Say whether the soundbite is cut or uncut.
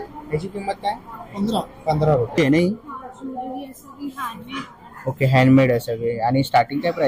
cut